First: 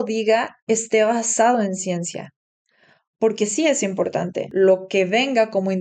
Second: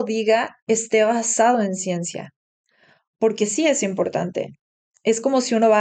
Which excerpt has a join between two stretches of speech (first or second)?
first